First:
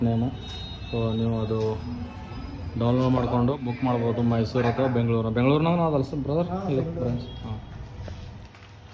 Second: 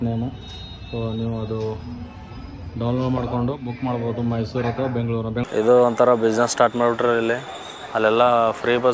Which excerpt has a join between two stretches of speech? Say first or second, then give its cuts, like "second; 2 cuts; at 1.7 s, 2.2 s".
second; 1 cut; at 5.4 s